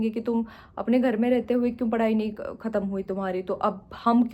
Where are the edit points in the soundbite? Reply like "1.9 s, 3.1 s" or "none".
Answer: none